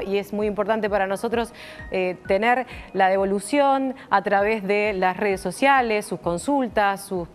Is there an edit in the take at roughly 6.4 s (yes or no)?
yes